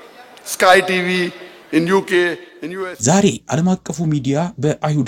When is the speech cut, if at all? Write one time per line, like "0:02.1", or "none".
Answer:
0:02.7